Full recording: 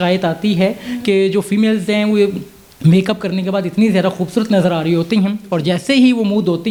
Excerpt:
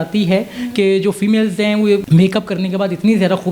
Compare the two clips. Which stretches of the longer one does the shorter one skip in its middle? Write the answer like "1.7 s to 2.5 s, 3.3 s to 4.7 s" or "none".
2.3 s to 2.8 s

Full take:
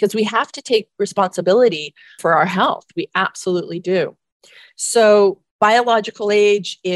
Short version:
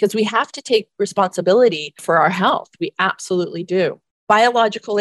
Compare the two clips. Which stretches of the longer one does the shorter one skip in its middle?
1.9 s to 2.1 s, 4.3 s to 5.5 s

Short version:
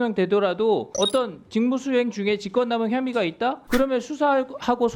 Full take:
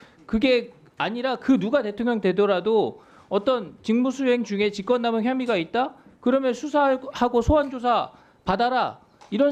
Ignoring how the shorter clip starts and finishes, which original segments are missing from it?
3.0 s to 3.2 s, 5.9 s to 6.1 s

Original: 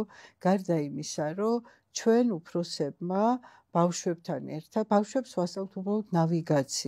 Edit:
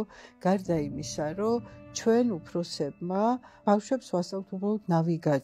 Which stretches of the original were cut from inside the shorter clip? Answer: 3.6 s to 4.9 s

